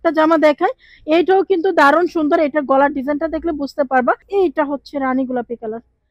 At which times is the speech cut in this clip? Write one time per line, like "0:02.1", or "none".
0:04.2